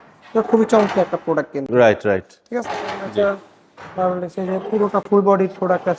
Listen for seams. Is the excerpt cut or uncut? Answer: uncut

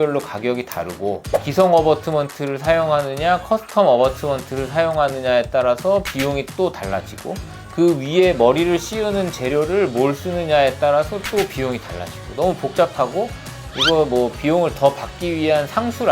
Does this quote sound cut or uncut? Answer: cut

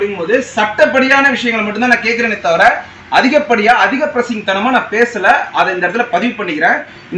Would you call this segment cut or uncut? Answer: uncut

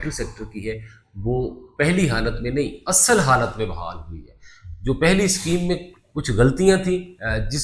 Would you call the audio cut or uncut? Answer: uncut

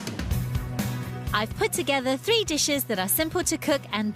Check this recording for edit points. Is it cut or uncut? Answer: cut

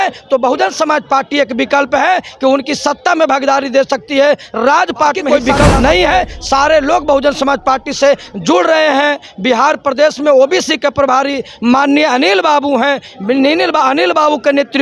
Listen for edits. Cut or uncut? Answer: cut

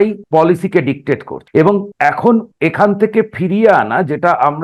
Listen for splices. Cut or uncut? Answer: uncut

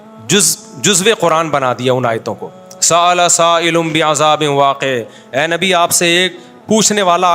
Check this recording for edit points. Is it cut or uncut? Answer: uncut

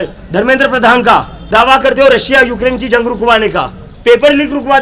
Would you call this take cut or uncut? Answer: cut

